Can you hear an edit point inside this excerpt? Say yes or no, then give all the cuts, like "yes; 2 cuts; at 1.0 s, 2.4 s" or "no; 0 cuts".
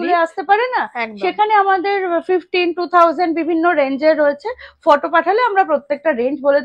no; 0 cuts